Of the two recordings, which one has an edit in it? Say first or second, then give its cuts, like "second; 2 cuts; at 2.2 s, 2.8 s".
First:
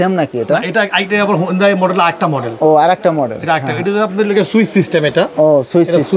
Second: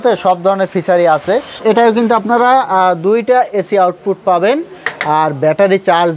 second; 1 cut; at 1.6 s